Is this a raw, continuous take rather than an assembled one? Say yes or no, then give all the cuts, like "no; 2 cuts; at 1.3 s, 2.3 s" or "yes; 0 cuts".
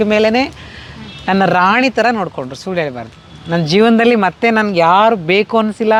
yes; 0 cuts